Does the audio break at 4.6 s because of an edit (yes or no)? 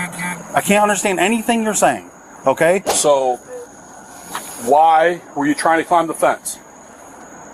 no